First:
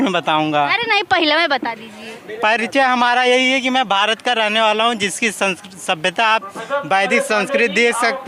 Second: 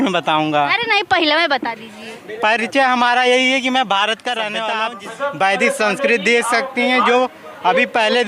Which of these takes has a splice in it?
second; 1 cut; at 4.8 s

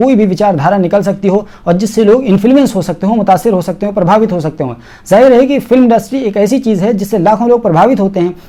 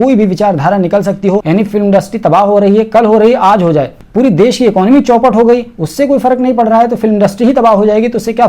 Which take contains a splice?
second; 2 cuts; at 1.4 s, 4.0 s

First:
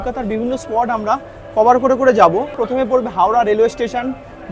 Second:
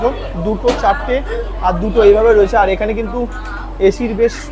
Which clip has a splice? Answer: first; 1 cut; at 2.5 s

